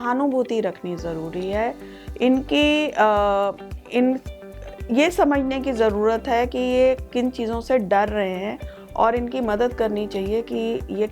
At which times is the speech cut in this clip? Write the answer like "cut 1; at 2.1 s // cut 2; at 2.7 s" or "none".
none